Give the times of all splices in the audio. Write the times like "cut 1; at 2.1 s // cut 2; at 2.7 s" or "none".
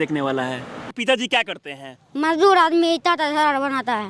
cut 1; at 0.9 s